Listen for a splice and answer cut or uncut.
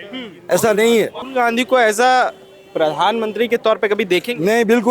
cut